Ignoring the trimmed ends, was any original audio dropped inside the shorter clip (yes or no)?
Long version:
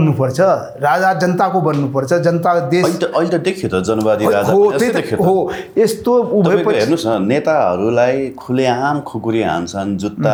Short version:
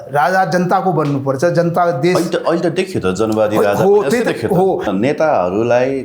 yes